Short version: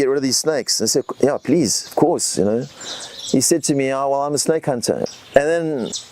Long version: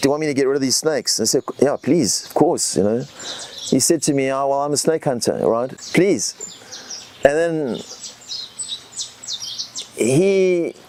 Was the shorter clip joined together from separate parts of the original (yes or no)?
yes